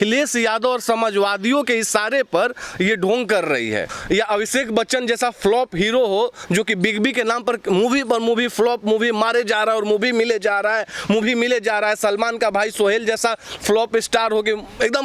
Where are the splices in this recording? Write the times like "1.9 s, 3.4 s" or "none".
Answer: 3.9 s